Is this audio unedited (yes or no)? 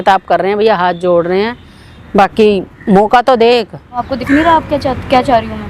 no